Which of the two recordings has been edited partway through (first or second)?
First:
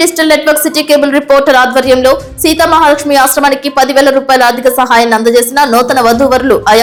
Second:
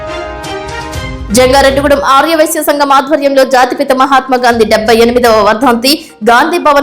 second